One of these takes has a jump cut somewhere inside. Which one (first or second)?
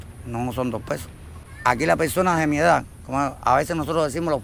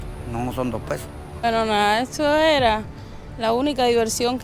second